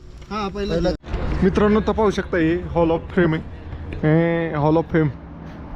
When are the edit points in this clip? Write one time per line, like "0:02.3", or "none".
0:00.9